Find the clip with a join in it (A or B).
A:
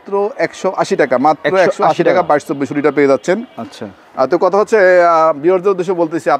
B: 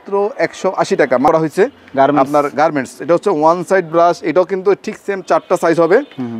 B